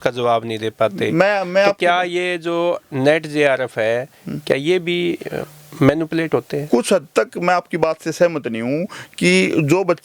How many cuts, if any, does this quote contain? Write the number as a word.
zero